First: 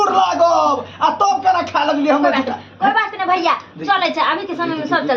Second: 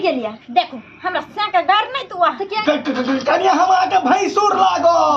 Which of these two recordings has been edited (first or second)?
second